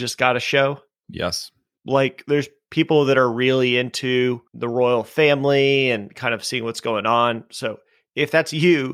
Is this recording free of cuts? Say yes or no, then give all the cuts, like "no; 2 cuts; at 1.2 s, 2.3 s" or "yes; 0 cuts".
no; 2 cuts; at 1.7 s, 4.5 s